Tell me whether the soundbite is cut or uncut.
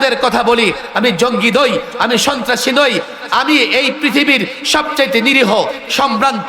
uncut